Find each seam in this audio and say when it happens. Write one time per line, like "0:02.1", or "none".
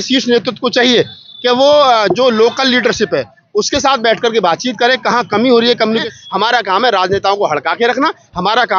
0:06.1

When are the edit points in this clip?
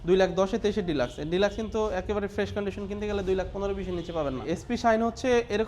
0:04.6

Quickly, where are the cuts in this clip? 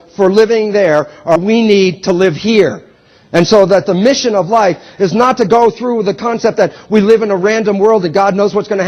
0:05.4

